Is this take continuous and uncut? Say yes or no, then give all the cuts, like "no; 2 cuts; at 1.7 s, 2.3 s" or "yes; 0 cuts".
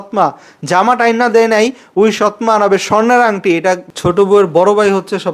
no; 1 cut; at 3.9 s